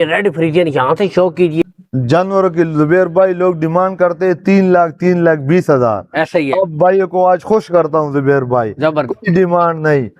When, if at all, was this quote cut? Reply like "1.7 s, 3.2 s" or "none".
1.6 s